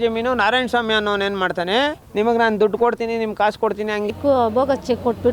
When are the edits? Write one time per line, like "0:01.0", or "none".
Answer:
0:02.0
0:04.1